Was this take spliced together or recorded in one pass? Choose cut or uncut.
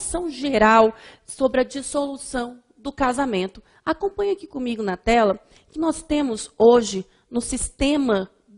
uncut